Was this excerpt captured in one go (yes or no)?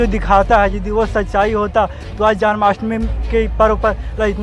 yes